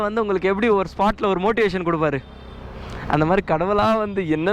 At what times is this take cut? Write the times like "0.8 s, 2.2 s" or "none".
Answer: none